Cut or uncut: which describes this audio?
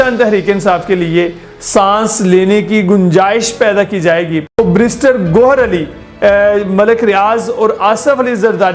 cut